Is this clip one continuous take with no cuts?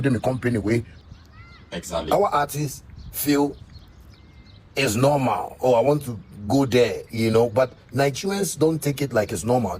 no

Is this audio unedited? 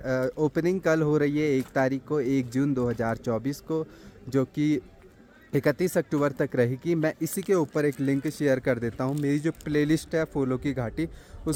yes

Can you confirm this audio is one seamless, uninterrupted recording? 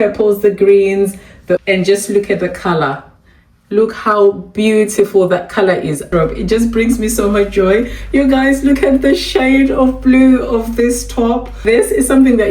no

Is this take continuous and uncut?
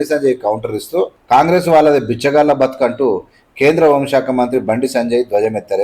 no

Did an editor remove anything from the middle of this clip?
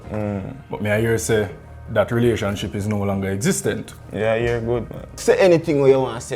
yes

